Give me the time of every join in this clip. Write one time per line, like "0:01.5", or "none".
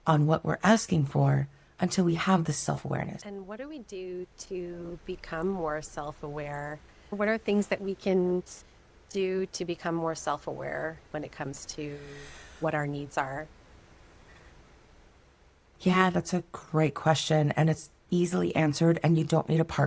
none